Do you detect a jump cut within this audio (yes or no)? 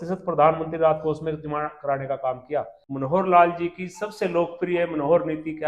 yes